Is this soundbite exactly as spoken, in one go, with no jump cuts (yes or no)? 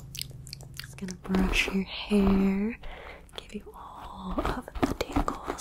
no